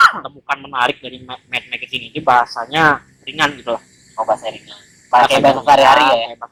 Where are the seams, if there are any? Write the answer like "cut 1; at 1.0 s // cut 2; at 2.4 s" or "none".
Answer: none